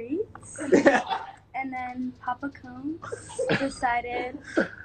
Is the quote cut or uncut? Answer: cut